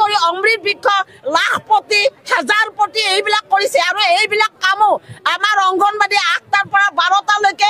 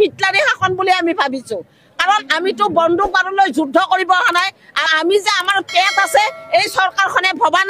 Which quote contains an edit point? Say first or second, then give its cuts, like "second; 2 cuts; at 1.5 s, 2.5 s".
second; 1 cut; at 4.9 s